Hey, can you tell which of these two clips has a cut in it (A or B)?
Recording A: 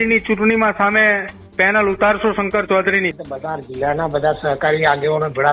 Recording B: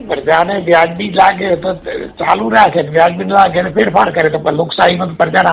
A